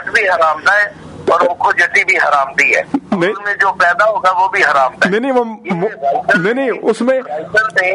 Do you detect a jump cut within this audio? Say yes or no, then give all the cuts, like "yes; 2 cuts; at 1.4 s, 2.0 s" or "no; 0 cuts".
no; 0 cuts